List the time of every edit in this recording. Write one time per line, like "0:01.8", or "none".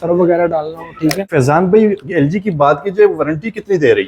0:01.3